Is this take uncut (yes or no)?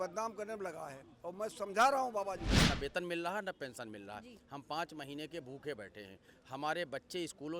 no